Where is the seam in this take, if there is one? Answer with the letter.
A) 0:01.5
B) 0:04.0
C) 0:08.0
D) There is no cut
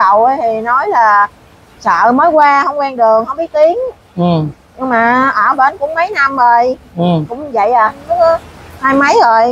C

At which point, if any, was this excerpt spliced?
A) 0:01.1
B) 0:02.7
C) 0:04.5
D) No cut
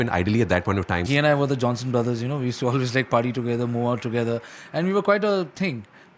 A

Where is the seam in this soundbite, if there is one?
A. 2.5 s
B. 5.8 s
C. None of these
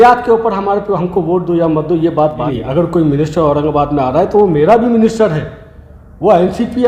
A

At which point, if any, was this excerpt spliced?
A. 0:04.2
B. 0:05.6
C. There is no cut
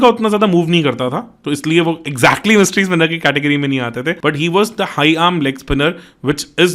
A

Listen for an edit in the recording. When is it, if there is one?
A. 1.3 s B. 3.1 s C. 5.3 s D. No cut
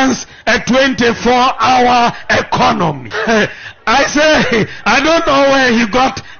B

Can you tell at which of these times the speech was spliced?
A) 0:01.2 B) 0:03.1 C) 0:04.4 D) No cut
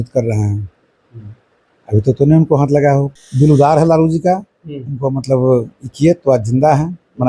B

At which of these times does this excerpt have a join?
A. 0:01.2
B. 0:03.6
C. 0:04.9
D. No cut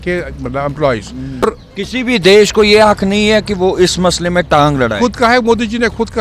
A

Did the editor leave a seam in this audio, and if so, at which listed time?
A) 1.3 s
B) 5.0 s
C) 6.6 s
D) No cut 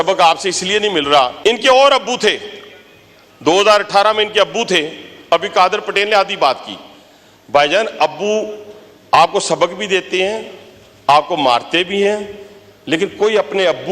A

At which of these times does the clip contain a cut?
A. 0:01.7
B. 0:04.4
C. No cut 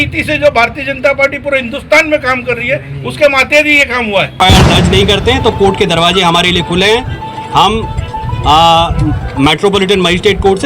B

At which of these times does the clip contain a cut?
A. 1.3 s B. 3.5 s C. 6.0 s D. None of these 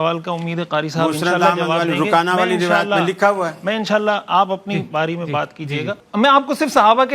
C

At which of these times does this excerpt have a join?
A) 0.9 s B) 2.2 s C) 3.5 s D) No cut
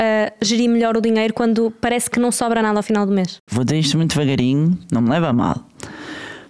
C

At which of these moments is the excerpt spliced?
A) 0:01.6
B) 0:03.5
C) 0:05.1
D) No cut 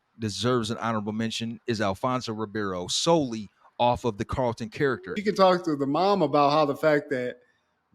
C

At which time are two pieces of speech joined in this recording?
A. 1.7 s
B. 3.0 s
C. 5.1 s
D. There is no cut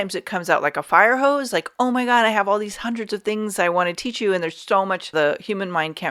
C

